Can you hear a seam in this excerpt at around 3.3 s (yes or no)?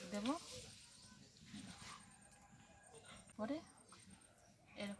yes